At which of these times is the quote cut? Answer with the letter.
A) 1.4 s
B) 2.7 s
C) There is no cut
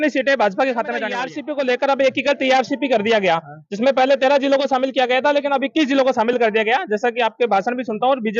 A